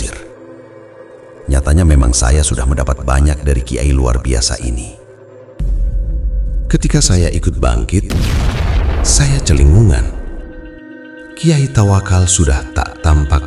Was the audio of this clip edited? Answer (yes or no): no